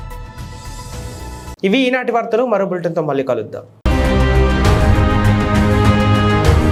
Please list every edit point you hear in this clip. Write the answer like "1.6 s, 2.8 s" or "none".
none

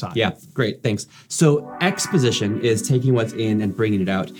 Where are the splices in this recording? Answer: none

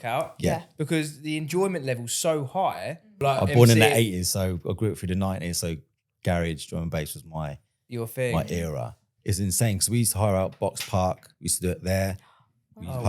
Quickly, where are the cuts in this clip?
3.2 s, 9.1 s

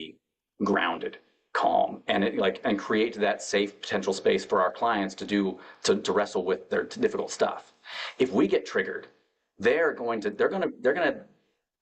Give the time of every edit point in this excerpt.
none

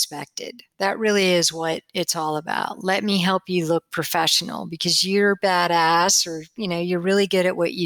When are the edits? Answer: none

